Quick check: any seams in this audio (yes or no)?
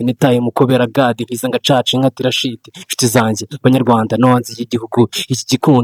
no